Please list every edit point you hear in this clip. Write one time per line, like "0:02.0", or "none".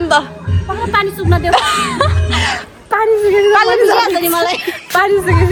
none